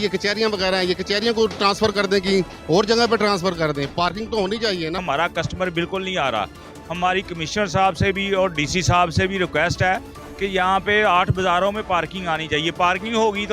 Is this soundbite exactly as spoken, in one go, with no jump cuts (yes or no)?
no